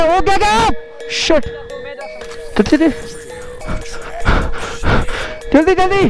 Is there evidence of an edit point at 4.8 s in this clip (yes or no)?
no